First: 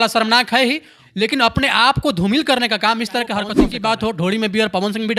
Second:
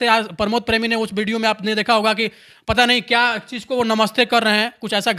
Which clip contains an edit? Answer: first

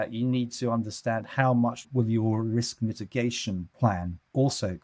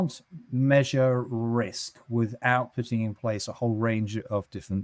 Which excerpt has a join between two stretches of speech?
first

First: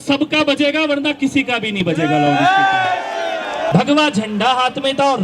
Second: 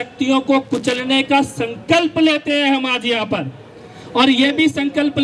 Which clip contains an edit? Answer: first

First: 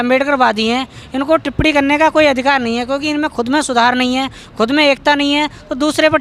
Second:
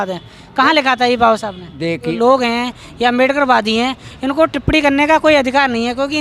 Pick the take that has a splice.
second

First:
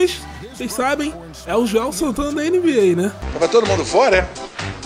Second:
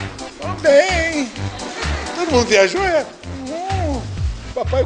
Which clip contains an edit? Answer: first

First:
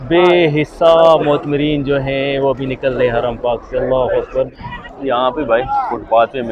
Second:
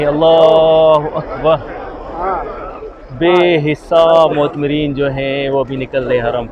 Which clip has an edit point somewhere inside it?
first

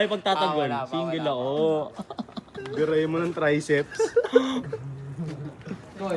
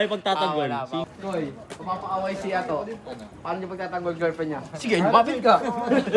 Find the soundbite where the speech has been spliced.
second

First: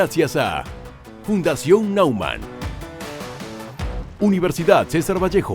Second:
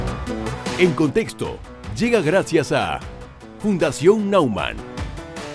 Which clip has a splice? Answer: first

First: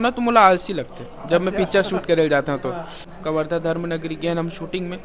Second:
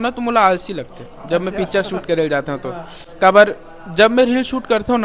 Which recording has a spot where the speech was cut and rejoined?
first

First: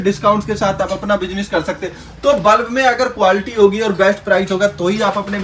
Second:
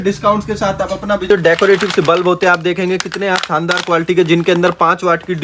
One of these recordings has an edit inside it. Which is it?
second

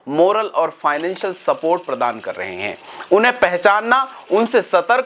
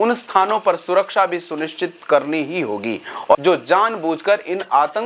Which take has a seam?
second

